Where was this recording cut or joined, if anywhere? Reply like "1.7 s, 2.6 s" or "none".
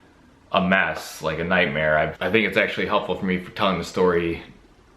2.1 s